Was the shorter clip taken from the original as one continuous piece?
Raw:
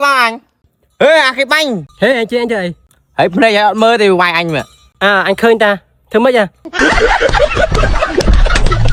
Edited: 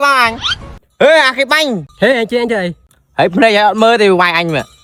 yes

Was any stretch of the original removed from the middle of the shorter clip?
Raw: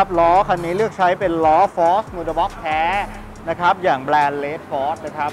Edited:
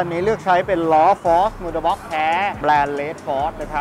yes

